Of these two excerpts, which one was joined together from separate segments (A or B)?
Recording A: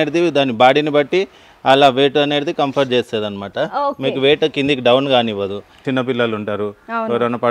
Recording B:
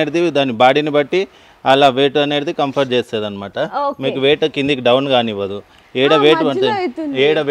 A